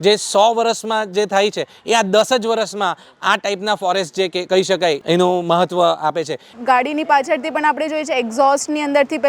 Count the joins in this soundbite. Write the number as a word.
two